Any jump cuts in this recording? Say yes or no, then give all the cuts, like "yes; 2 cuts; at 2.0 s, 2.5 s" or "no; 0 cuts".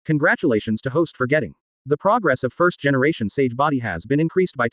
yes; 1 cut; at 1.4 s